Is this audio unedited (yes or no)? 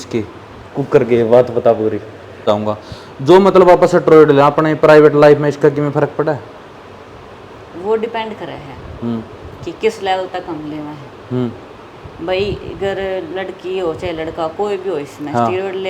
no